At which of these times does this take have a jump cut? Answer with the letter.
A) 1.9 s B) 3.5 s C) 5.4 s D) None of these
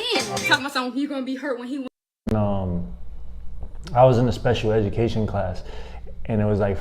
A